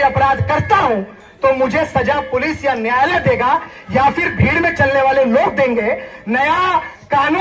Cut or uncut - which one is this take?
uncut